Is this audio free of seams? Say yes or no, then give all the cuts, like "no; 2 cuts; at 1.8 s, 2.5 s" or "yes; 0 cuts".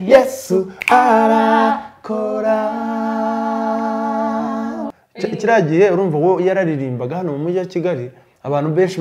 no; 1 cut; at 5.0 s